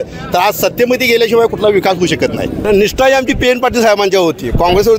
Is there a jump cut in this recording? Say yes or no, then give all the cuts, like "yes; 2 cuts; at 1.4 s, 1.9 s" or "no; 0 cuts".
yes; 1 cut; at 2.5 s